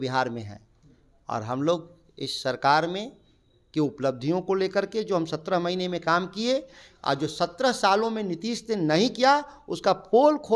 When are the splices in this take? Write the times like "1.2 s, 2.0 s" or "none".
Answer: none